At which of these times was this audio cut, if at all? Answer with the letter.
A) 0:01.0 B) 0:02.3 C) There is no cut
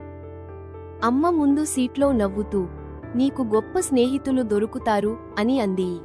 A